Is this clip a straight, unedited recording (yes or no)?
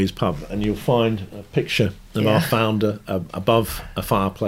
yes